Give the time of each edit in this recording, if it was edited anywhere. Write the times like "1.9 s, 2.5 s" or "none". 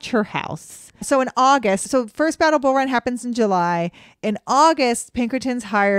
none